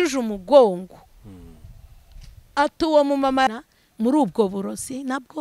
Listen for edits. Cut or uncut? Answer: cut